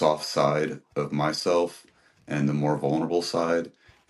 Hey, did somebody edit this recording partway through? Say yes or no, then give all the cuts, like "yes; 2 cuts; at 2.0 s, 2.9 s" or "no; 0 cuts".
no; 0 cuts